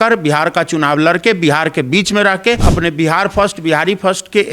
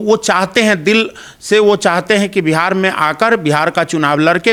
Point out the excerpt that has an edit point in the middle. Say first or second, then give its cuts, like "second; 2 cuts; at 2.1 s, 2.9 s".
first; 1 cut; at 2.7 s